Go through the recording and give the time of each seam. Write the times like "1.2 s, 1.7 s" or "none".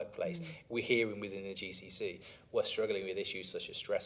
none